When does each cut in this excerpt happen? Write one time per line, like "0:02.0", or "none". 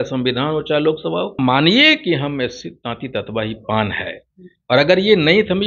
0:01.4